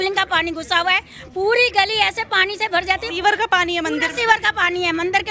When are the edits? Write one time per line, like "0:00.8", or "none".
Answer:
none

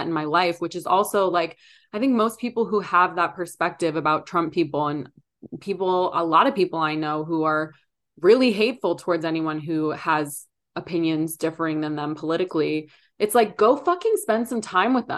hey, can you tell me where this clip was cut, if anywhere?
none

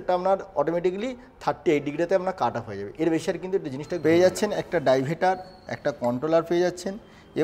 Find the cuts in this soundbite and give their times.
0:03.9

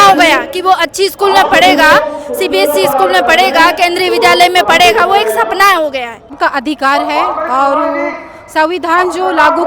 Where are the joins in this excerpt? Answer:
0:06.4

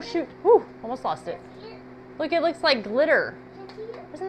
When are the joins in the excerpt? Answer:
none

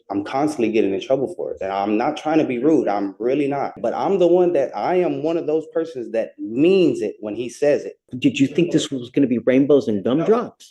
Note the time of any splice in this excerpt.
0:03.7
0:08.1

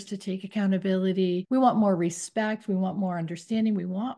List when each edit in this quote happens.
0:01.4

